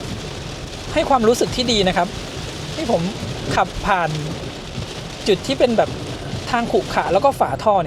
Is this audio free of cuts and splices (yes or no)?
yes